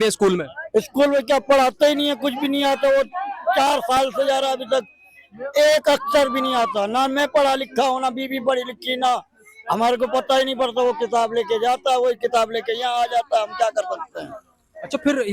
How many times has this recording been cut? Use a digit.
0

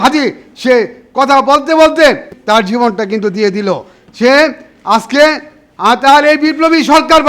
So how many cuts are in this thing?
1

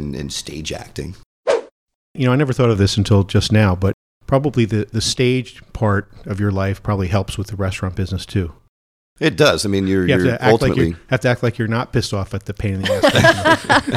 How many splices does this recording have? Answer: 1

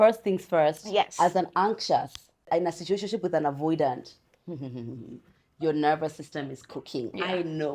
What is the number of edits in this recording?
1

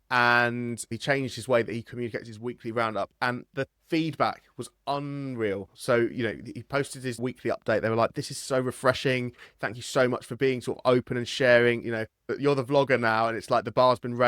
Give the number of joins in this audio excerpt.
0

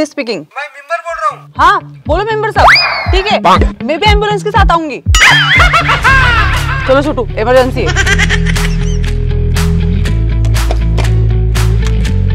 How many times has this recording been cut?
0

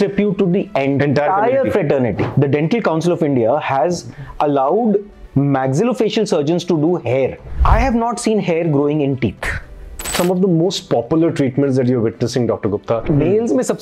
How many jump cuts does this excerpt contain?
4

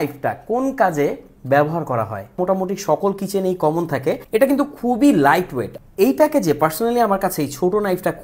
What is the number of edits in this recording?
3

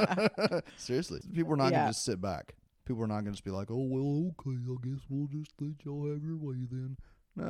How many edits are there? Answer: 1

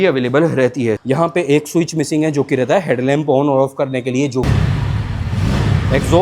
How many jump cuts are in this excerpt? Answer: 2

